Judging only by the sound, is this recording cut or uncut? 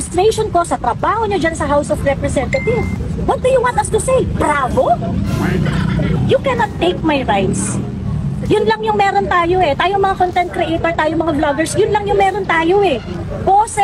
cut